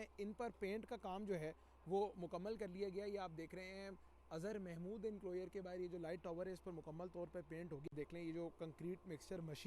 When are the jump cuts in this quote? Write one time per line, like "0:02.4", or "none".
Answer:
0:07.9